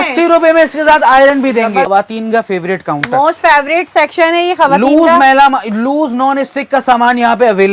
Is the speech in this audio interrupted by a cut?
yes; 1 cut; at 1.9 s

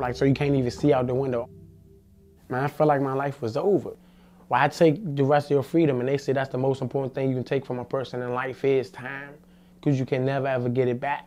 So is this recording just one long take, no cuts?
yes; 0 cuts

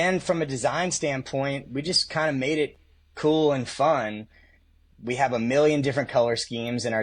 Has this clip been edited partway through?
no; 0 cuts

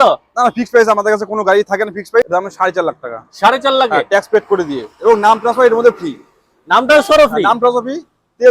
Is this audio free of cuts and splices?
no; 1 cut; at 2.3 s

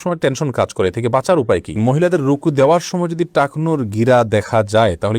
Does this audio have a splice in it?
yes; 1 cut; at 1.8 s

